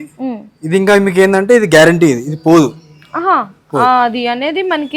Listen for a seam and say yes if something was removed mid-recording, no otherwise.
no